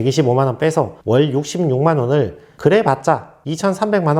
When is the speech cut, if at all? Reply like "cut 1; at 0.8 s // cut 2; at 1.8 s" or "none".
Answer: cut 1; at 2.5 s